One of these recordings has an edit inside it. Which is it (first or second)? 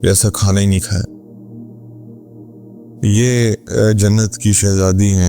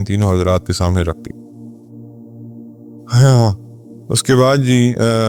first